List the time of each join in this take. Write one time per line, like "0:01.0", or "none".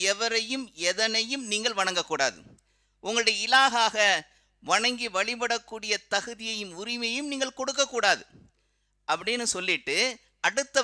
none